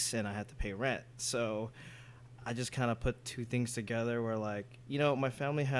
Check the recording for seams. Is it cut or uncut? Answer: uncut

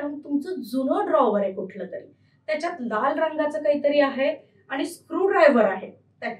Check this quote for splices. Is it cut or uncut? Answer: uncut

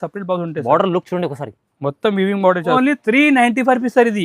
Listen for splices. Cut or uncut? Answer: cut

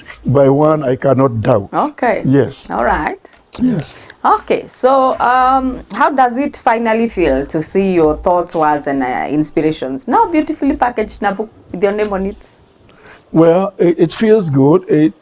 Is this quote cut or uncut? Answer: uncut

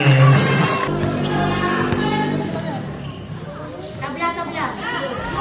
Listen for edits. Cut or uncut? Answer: cut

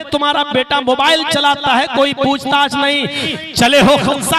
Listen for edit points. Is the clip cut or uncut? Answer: cut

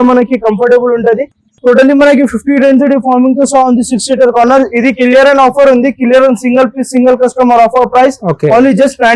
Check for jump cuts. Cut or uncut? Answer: uncut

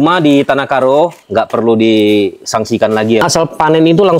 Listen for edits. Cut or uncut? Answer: cut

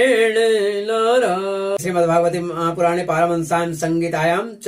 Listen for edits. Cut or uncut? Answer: cut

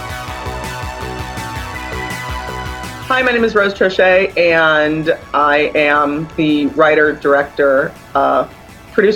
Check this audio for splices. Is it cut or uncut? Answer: uncut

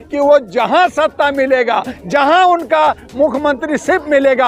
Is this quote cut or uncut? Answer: uncut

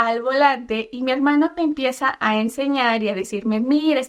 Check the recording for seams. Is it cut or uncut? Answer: uncut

